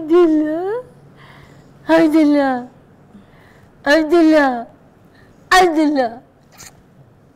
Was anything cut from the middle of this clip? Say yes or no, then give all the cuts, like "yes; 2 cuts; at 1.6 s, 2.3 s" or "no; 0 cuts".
no; 0 cuts